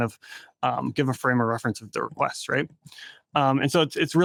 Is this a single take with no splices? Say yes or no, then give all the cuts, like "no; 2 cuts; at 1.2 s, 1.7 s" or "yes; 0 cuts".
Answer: yes; 0 cuts